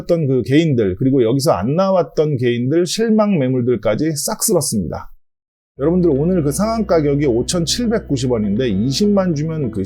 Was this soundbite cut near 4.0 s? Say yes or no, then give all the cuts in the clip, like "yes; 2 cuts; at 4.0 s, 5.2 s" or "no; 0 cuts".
no; 1 cut; at 5.2 s